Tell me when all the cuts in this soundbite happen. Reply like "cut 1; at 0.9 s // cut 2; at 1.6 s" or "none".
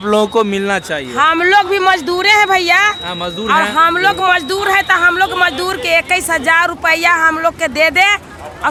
none